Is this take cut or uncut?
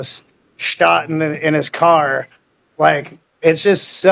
uncut